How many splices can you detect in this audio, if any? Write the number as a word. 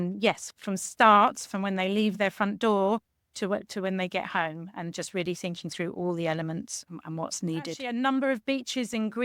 one